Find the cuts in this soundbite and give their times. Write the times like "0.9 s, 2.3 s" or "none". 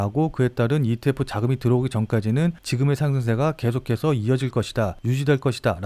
none